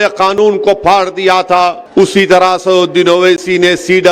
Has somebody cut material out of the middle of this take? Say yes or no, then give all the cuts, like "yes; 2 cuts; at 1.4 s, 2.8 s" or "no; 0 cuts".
yes; 1 cut; at 1.8 s